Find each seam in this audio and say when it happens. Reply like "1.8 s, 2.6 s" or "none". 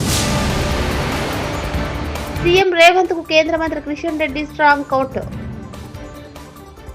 none